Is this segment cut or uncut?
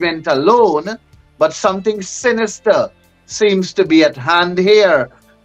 uncut